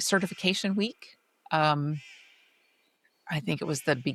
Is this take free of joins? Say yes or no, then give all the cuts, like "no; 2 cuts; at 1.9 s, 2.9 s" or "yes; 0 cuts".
yes; 0 cuts